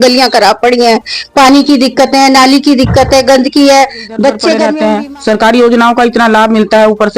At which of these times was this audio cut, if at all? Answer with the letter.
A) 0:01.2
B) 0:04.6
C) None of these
B